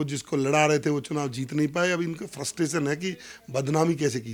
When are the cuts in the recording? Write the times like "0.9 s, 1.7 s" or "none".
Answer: none